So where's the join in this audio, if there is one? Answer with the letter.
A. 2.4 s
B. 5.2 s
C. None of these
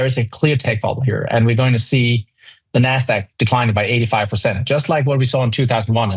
C